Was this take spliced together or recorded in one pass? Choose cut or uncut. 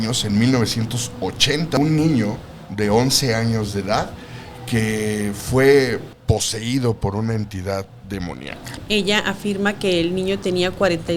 cut